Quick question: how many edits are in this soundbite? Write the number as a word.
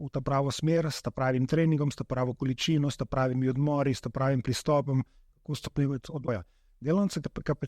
one